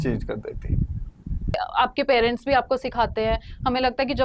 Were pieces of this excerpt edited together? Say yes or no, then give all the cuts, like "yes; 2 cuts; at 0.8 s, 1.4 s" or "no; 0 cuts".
yes; 1 cut; at 1.6 s